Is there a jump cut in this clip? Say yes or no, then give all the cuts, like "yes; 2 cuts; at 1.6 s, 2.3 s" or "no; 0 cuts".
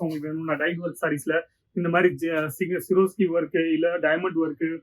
no; 0 cuts